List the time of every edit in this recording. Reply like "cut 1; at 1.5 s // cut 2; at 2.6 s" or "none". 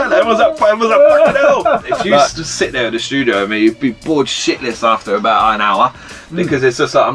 cut 1; at 2.3 s

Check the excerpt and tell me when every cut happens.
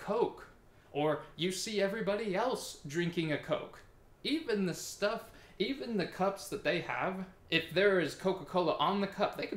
cut 1; at 7.3 s

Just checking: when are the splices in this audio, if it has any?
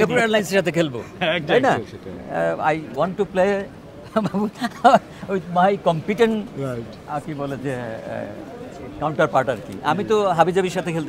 none

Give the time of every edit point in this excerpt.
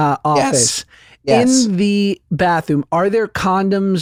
none

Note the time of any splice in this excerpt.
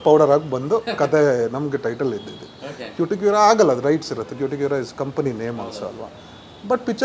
none

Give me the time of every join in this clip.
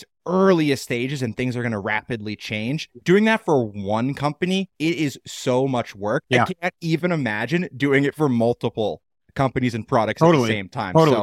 cut 1; at 4.7 s // cut 2; at 6.2 s

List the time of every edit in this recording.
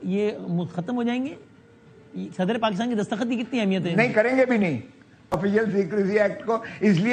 cut 1; at 5.3 s

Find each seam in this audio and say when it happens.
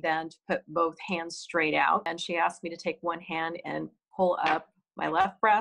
cut 1; at 2.1 s

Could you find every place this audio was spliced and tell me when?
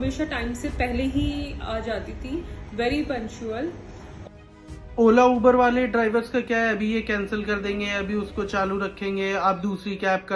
cut 1; at 4.3 s

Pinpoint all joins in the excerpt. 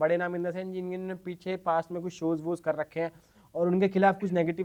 none

